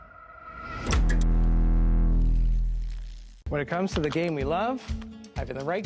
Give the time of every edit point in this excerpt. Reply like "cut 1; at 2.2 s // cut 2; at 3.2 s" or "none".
cut 1; at 0.9 s